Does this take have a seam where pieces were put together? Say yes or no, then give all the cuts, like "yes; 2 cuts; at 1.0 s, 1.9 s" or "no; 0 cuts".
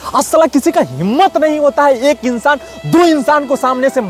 no; 0 cuts